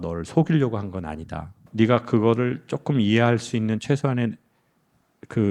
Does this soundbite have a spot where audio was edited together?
yes; 1 cut; at 1.6 s

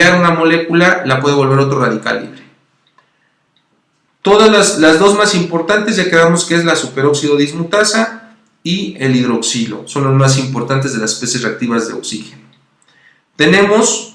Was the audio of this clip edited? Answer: yes; 1 cut; at 3.0 s

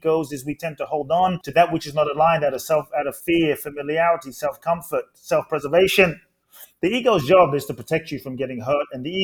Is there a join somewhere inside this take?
yes; 2 cuts; at 1.4 s, 3.2 s

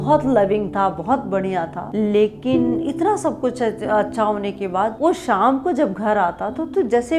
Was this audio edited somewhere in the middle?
no; 0 cuts

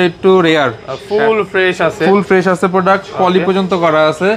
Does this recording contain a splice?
no; 0 cuts

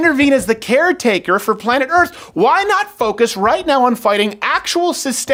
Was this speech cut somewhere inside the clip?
no; 0 cuts

